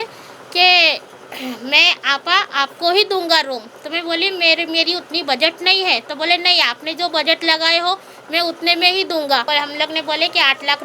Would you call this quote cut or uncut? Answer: cut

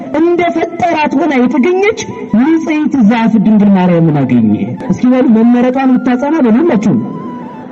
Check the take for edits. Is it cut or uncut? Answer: cut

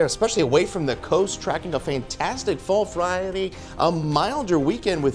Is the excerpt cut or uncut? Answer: uncut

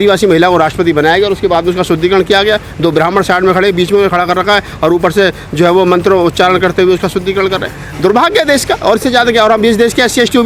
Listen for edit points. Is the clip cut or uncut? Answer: uncut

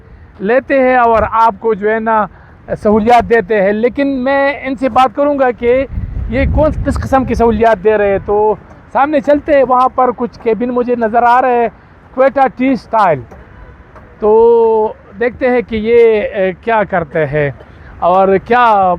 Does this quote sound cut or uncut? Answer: uncut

